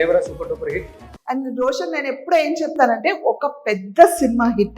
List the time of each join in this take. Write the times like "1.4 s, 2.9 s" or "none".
1.0 s